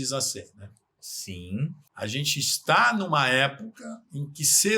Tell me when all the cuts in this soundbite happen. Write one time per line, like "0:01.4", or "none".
0:01.8